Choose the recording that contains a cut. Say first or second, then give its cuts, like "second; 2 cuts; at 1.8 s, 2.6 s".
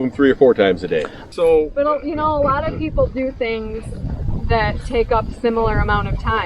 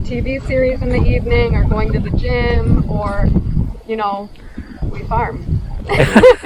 first; 1 cut; at 1.2 s